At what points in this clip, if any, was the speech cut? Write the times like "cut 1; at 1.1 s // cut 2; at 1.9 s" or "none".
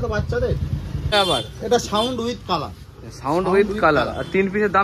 cut 1; at 1.1 s